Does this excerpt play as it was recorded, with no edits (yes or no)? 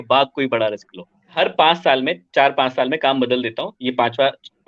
no